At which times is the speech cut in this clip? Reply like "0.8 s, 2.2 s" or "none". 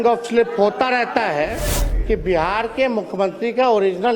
1.9 s